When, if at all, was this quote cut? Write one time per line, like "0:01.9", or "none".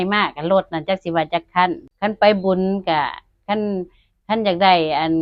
0:01.9